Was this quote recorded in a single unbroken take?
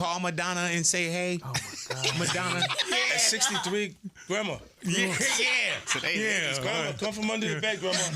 no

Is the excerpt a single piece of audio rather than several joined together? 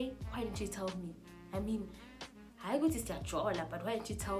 yes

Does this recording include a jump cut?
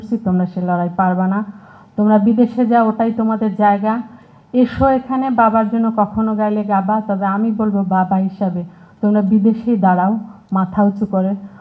no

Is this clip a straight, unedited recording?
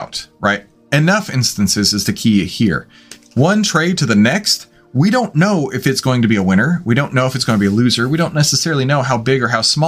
yes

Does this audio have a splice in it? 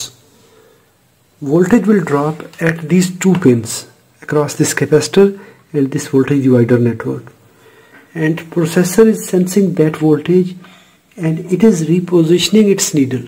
no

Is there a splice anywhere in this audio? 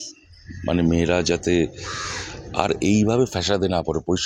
no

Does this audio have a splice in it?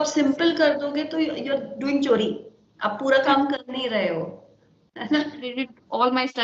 yes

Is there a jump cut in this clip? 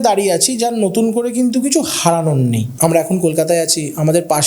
yes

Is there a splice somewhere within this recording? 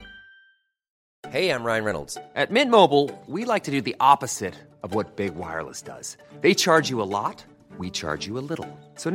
no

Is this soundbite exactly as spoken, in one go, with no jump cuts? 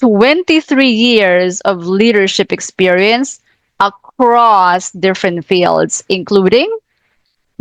yes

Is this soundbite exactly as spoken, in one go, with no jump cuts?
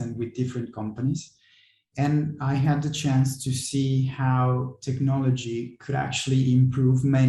yes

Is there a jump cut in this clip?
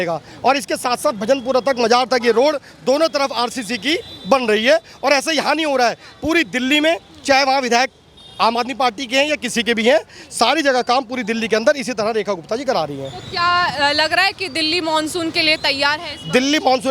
no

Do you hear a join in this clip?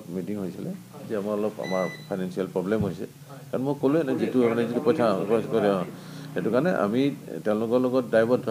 no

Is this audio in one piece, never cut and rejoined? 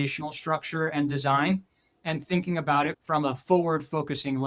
no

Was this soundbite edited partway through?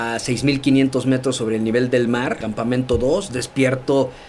yes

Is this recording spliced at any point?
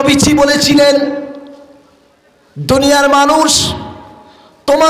no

